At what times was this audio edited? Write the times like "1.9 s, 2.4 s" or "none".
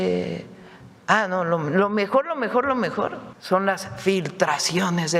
3.3 s